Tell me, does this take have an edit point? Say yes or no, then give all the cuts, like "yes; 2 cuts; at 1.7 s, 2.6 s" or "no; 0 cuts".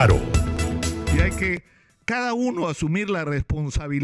yes; 1 cut; at 1.1 s